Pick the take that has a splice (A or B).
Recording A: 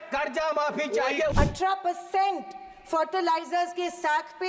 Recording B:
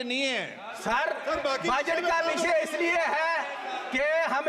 A